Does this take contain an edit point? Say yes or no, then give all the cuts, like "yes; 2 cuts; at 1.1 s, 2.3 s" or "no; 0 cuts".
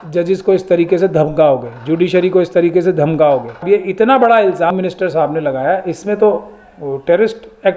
yes; 2 cuts; at 3.6 s, 4.7 s